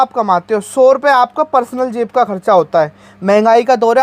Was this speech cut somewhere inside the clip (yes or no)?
no